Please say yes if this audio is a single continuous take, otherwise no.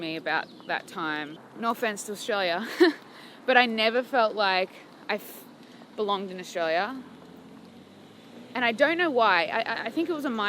no